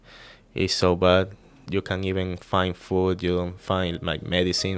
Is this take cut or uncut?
cut